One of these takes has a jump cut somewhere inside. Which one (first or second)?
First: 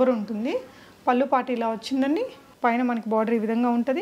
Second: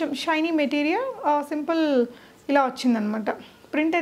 first